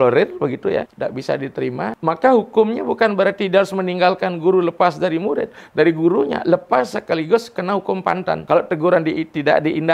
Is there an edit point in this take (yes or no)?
yes